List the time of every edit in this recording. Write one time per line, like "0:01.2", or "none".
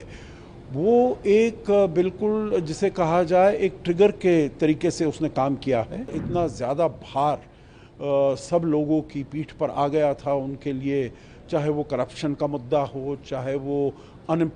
0:06.2